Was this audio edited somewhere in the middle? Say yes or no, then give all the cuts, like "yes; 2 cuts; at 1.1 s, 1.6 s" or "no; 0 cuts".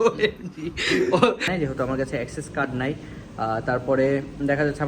yes; 1 cut; at 1.5 s